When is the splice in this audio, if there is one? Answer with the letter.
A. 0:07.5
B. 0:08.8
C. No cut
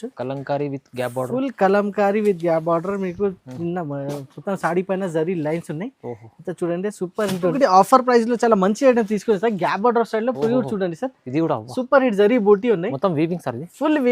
A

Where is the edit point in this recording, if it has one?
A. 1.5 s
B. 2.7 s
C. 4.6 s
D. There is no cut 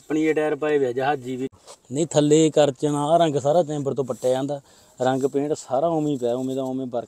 A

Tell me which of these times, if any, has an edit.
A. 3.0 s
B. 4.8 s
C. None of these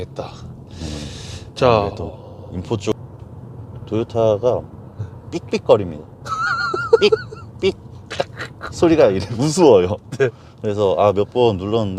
A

